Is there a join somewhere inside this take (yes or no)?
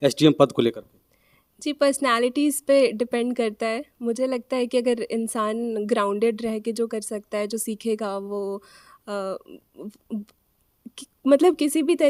no